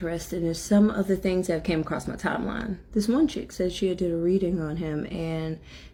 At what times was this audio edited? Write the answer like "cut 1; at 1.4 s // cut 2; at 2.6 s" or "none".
none